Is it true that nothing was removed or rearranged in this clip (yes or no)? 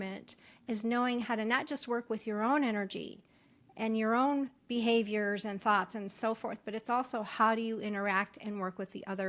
yes